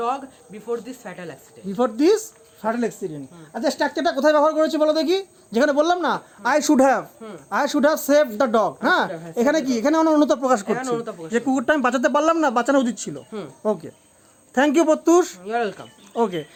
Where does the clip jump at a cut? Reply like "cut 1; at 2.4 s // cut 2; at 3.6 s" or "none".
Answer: none